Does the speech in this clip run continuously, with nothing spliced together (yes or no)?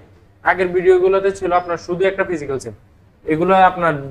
yes